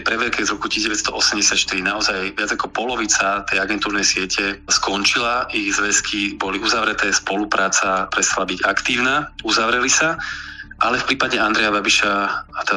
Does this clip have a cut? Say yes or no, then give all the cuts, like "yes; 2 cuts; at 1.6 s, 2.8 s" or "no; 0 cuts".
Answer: no; 0 cuts